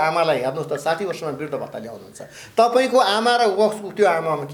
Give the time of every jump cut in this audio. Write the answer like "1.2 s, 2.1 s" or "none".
none